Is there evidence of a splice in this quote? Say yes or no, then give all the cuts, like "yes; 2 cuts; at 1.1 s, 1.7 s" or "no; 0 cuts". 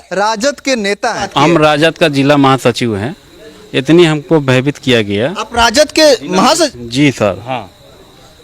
yes; 1 cut; at 1.3 s